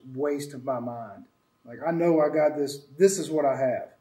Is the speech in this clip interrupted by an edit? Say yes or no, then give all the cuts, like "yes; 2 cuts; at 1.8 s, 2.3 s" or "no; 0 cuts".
no; 0 cuts